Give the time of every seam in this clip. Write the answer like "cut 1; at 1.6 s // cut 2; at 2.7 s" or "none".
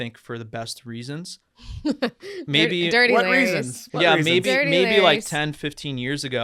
none